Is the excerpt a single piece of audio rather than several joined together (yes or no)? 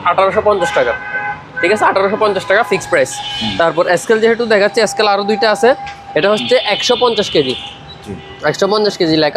yes